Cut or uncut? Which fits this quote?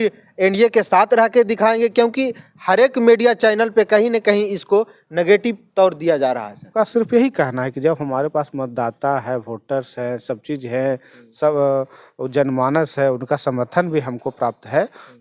cut